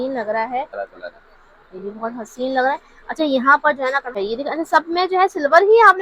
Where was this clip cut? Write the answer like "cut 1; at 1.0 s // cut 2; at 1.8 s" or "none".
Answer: cut 1; at 0.8 s // cut 2; at 4.1 s